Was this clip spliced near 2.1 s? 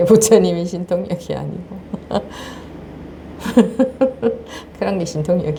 no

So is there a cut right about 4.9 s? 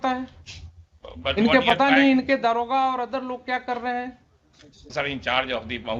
yes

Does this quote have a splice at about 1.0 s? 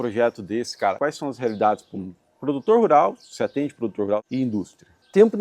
yes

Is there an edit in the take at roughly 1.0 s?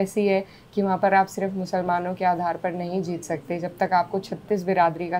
no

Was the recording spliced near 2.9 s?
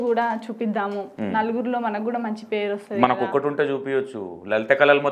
no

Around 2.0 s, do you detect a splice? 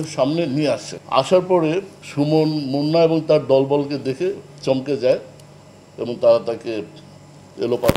yes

